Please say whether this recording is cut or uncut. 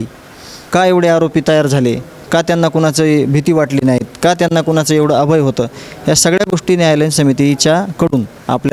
uncut